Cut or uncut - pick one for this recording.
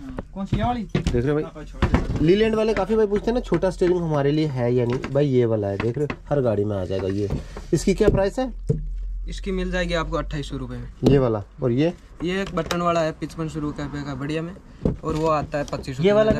uncut